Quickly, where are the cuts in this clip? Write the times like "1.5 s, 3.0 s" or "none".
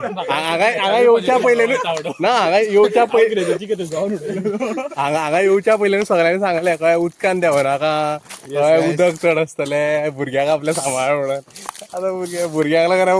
none

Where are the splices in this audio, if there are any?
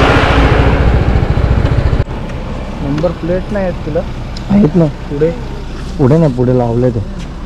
2.1 s

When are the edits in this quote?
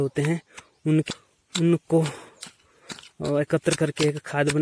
1.1 s

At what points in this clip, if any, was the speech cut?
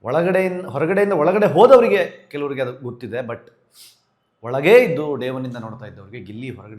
none

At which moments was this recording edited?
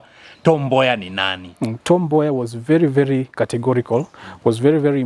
1.8 s

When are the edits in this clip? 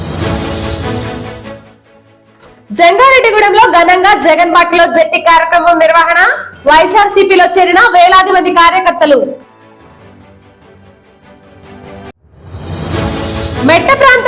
0.9 s

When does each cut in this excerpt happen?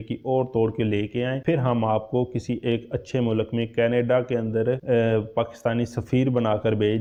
none

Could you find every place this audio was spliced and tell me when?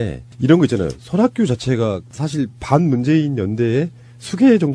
1.3 s

